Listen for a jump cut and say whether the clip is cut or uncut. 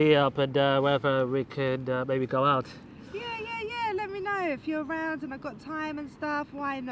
uncut